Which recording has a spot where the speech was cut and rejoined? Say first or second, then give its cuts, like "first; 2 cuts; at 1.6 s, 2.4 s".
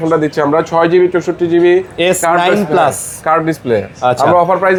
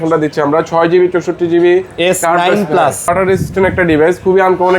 second; 1 cut; at 3.1 s